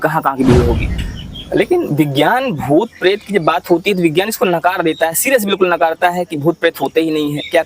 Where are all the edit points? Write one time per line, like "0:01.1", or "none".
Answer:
0:00.9